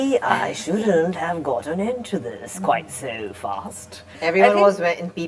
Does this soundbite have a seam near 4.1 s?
yes; 1 cut; at 4.1 s

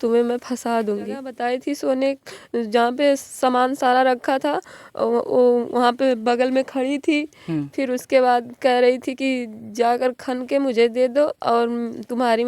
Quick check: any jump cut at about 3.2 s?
no; 1 cut; at 1.3 s

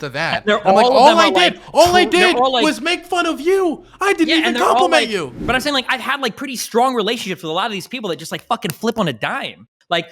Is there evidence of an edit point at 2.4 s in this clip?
no; 1 cut; at 5.4 s

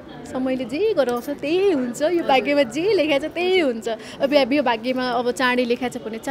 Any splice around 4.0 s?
no; 0 cuts

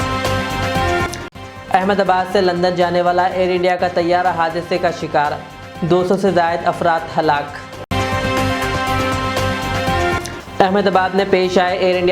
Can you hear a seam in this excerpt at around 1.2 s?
yes; 1 cut; at 1.2 s

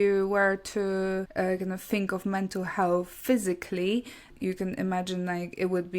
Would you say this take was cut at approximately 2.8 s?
no; 2 cuts; at 1.3 s, 4.3 s

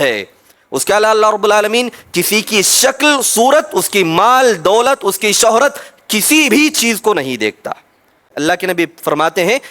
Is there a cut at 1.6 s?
no; 1 cut; at 8.3 s

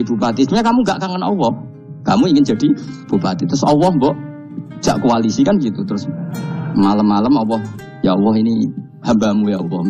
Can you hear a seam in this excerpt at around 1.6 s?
no; 0 cuts

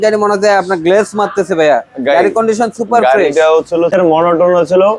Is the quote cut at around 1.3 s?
no; 1 cut; at 3.9 s

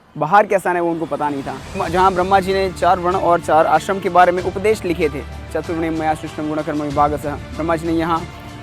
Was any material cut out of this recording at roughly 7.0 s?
no; 1 cut; at 1.8 s

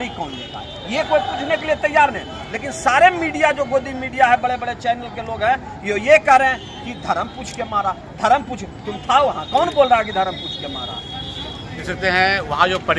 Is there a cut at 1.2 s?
no; 0 cuts

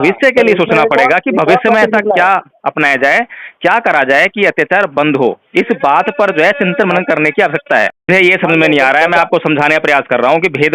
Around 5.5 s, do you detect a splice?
no; 1 cut; at 8.0 s

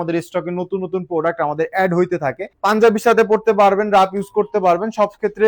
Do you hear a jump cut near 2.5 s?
yes; 1 cut; at 2.5 s

